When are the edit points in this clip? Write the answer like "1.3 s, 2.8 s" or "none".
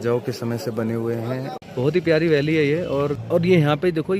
1.5 s, 3.2 s